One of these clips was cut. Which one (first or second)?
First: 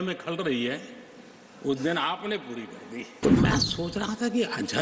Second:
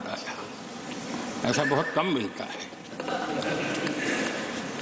first